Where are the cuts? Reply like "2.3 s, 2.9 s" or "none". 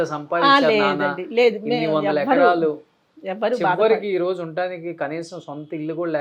none